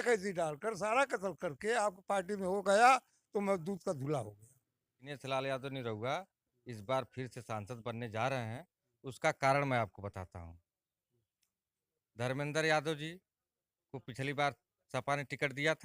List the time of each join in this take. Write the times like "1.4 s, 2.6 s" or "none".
5.1 s